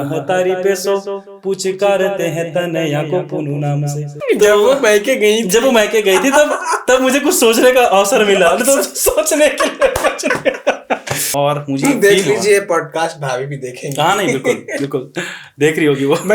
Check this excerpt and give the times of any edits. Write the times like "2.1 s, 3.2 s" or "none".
4.2 s, 11.2 s